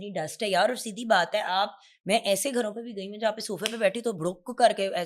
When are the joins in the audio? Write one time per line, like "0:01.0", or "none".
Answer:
none